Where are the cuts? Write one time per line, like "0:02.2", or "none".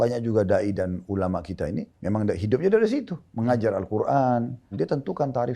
0:01.9
0:04.7